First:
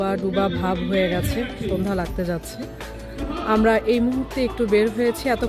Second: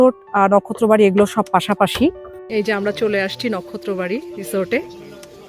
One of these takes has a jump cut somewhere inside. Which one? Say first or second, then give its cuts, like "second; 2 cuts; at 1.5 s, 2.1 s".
second; 1 cut; at 2.3 s